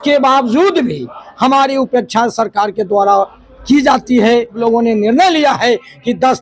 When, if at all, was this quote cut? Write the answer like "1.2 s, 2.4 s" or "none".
4.6 s